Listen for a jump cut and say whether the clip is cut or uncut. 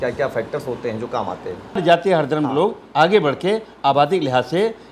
cut